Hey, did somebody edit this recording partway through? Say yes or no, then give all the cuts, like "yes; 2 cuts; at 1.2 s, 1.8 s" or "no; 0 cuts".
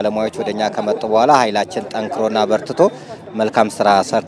no; 0 cuts